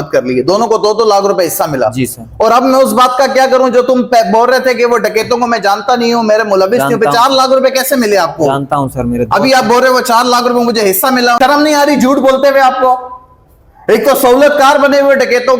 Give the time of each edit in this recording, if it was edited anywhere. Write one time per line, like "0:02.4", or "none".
0:11.4